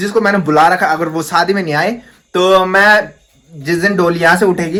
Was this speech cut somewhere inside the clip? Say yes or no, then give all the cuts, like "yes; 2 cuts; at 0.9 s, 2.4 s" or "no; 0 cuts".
no; 0 cuts